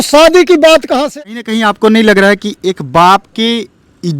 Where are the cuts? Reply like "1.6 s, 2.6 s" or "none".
1.0 s